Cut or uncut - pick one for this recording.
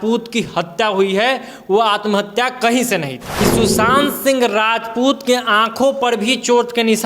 cut